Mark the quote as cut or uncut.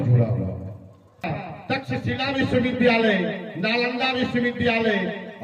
cut